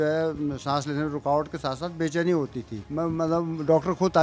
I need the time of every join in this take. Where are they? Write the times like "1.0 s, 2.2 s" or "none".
2.8 s